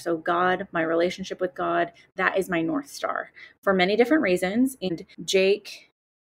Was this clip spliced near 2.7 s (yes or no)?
no